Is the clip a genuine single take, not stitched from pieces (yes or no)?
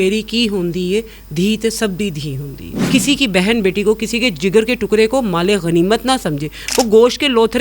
no